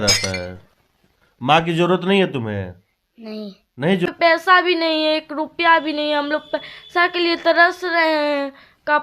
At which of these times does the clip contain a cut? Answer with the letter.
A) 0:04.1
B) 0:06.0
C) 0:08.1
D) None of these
A